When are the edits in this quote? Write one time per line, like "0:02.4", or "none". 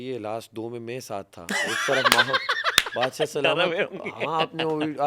none